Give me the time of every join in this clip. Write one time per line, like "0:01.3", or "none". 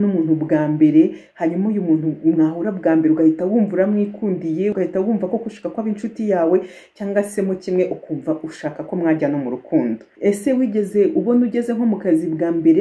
0:04.8
0:10.1